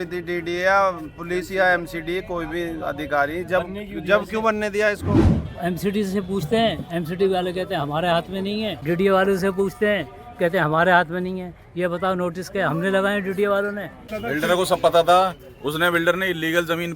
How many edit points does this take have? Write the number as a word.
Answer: three